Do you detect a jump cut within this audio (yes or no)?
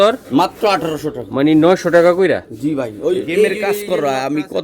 yes